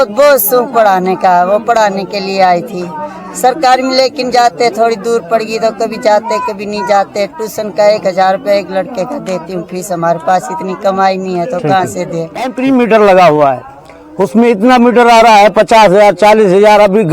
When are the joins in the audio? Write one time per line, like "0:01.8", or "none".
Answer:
0:12.5